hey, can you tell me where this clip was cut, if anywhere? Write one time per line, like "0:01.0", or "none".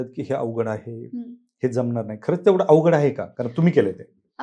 none